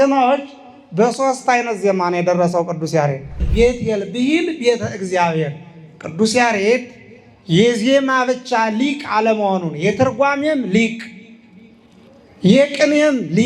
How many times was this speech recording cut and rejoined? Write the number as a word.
one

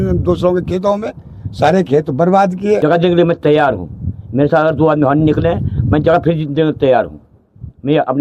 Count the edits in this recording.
one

